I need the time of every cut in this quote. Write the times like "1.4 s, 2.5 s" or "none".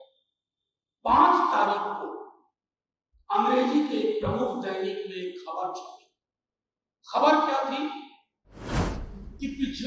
none